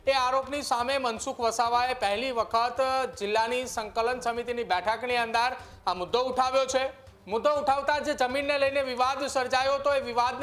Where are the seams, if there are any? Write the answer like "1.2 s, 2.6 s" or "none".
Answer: none